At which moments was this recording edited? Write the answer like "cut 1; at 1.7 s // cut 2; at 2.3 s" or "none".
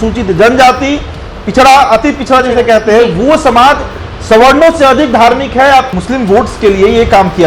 cut 1; at 6.0 s